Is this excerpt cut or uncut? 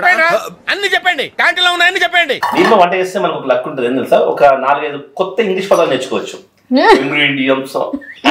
cut